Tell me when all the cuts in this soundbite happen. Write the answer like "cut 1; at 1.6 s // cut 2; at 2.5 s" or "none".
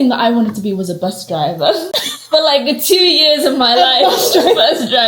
none